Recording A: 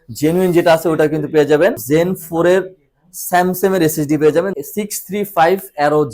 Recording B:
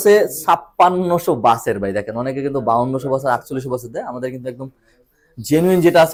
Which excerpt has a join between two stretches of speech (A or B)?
A